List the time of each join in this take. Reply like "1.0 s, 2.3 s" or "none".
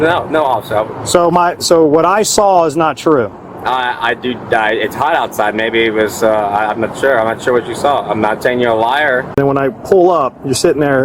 9.4 s